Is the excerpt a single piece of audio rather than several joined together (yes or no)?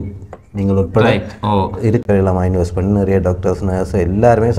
no